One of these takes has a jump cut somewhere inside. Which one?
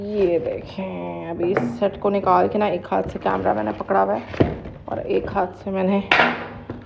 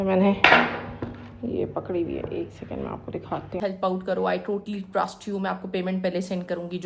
second; 1 cut; at 3.6 s

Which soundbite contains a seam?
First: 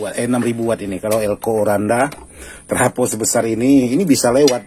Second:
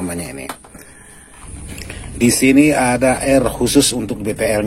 second; 1 cut; at 1.4 s

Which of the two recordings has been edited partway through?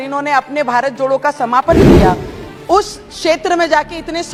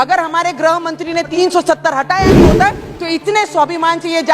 second; 1 cut; at 1.3 s

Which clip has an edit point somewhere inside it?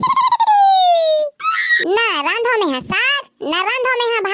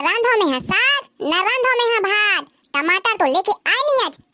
first; 1 cut; at 1.0 s

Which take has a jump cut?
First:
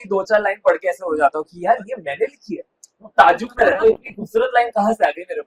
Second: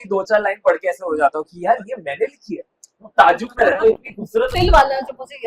second; 1 cut; at 4.5 s

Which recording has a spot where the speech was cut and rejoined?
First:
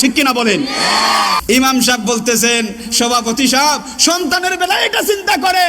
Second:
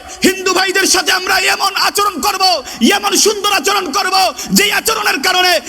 first; 1 cut; at 1.4 s

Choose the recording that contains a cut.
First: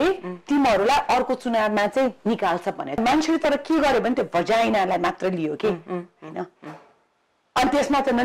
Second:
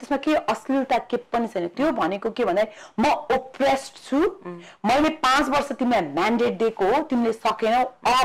first; 1 cut; at 3.0 s

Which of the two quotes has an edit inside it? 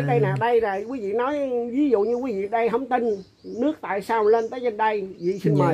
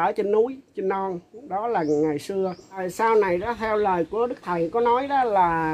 second; 1 cut; at 2.9 s

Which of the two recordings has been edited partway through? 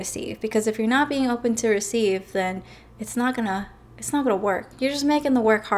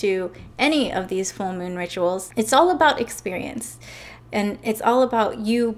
second; 1 cut; at 2.3 s

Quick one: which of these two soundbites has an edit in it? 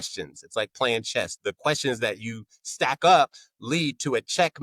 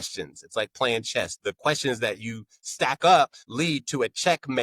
second; 1 cut; at 3.4 s

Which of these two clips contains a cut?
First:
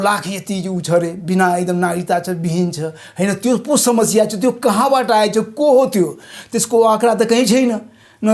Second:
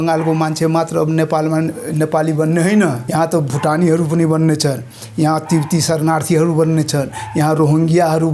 second; 1 cut; at 3.0 s

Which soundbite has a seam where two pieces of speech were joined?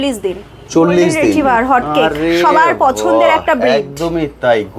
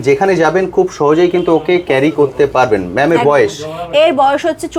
first; 1 cut; at 1.4 s

